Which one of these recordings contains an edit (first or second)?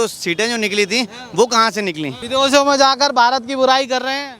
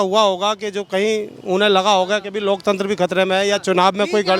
first